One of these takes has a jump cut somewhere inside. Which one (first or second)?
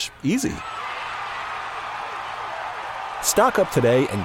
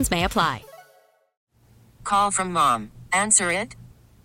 second